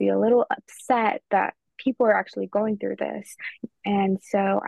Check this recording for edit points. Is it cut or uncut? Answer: cut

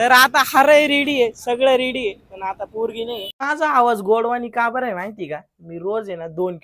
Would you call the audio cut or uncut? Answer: cut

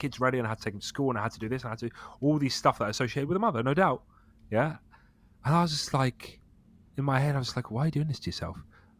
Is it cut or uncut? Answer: uncut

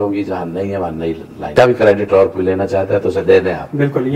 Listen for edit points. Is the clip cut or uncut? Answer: cut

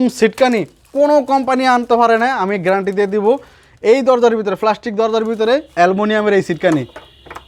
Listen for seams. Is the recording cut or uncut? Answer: uncut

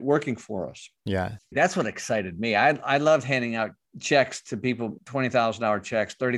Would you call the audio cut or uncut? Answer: cut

